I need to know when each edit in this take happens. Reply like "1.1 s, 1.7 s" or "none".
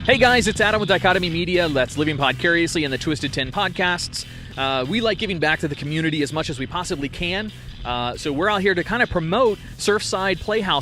3.0 s